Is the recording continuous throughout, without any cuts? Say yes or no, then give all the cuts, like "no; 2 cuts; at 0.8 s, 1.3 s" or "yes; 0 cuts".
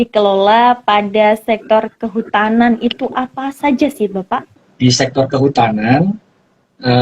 no; 1 cut; at 4.6 s